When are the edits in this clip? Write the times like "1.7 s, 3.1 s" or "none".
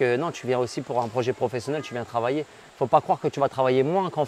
2.7 s

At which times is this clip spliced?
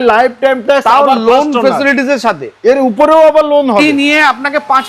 3.8 s

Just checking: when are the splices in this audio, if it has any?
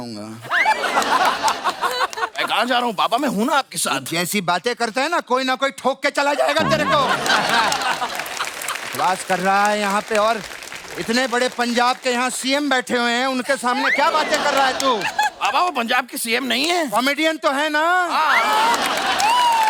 none

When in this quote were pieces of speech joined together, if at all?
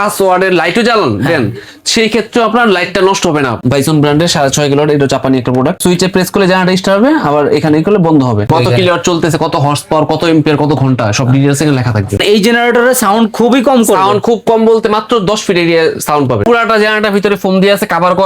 3.6 s, 5.8 s, 8.5 s, 12.2 s, 16.4 s

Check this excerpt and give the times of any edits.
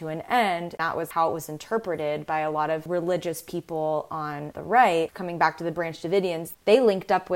0.9 s, 5.2 s

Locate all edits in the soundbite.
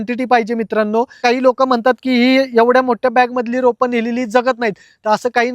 1.2 s

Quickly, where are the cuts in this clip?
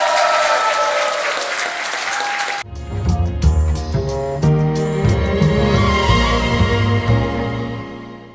2.6 s

